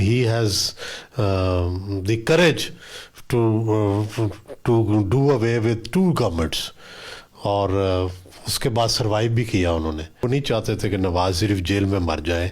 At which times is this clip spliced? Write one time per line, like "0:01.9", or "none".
0:10.2

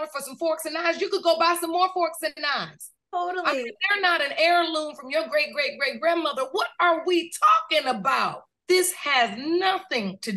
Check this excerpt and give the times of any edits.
0:08.5

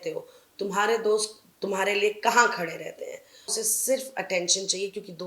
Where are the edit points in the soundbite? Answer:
0:03.6

